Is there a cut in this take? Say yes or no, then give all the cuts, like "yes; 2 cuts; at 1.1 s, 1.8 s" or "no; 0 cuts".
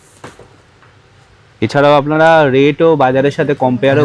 no; 0 cuts